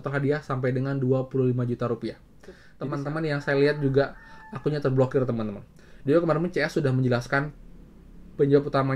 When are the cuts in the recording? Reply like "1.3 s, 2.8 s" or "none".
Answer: 2.7 s